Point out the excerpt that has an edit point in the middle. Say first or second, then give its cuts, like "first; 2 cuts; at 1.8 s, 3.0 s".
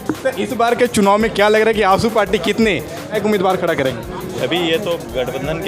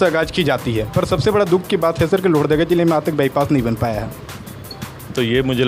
first; 1 cut; at 3.1 s